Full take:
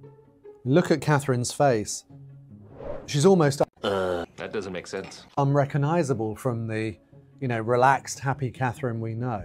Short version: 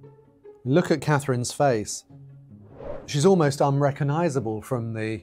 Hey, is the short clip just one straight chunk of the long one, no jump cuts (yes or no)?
no